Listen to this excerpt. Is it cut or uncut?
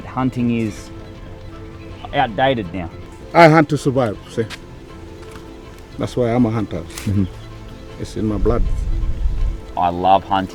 cut